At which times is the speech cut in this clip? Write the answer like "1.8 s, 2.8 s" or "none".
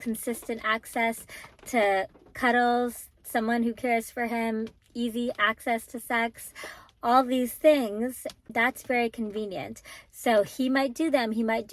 8.4 s